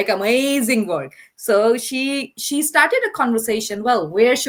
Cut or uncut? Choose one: uncut